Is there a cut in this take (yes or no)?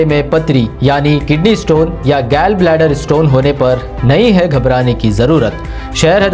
no